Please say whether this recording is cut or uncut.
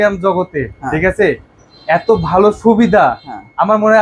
uncut